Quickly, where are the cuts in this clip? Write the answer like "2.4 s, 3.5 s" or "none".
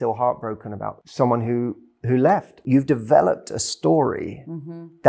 1.0 s, 2.6 s